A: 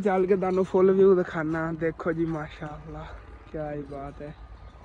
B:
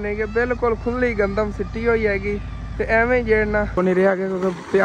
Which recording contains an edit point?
B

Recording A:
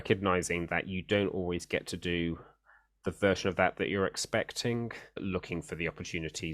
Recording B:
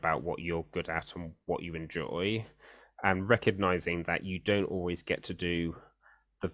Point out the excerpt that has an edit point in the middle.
A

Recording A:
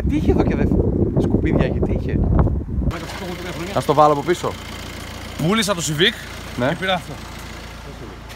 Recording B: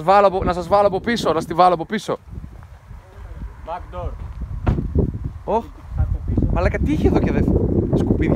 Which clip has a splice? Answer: A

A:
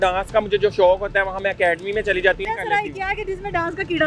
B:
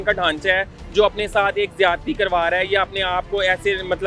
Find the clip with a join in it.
A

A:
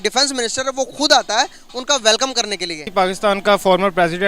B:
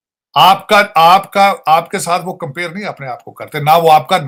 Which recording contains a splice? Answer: A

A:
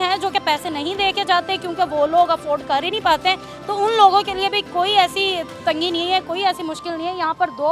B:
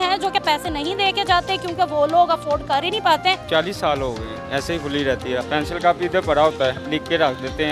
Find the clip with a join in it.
B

